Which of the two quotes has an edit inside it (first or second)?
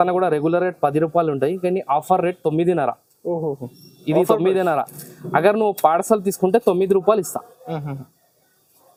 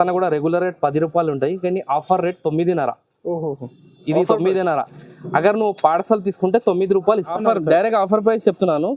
second